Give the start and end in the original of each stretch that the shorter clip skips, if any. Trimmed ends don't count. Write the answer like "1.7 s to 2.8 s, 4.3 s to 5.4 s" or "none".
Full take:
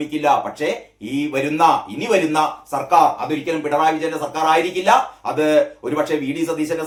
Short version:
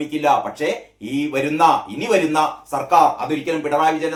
none